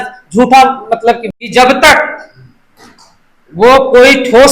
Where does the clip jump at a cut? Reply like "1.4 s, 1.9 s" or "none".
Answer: 1.2 s